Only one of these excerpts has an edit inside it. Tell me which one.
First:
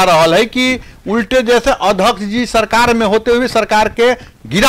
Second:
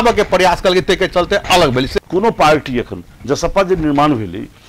second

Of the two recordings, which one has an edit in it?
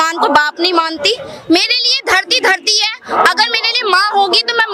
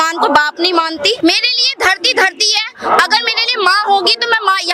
second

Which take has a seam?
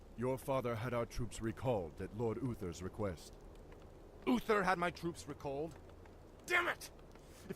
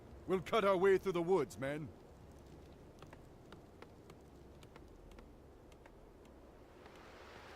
first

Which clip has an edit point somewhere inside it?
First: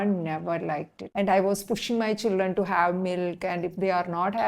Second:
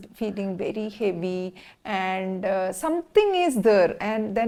first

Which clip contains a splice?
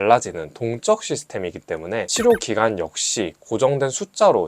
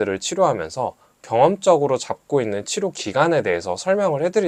first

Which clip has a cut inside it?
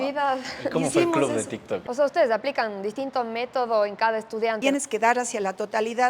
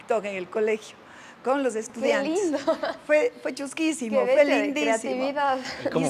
first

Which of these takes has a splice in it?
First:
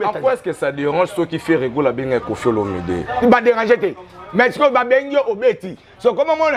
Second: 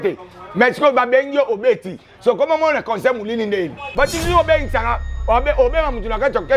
second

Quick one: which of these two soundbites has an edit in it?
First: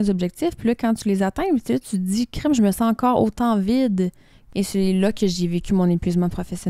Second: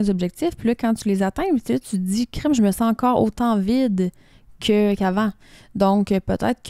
first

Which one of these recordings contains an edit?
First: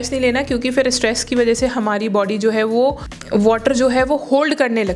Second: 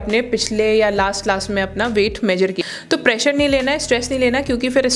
second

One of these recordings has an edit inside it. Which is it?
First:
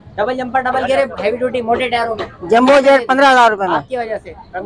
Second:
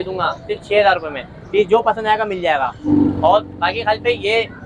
second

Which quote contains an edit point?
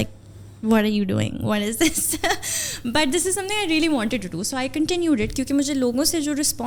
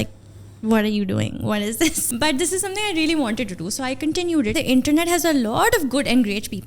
second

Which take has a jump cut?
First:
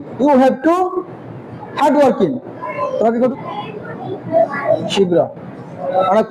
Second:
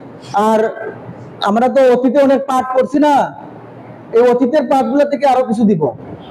first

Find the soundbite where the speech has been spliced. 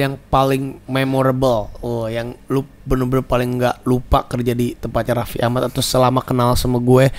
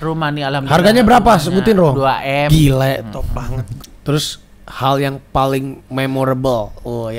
second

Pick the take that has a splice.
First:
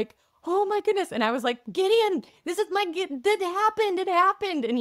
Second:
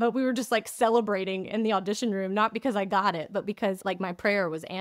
second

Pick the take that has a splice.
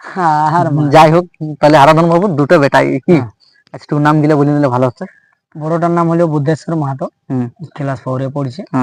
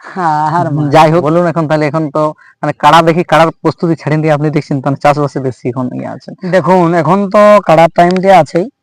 second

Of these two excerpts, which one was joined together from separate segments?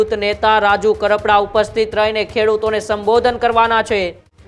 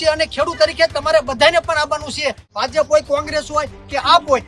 second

